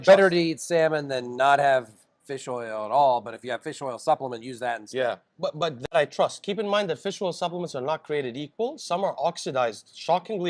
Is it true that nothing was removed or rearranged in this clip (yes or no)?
yes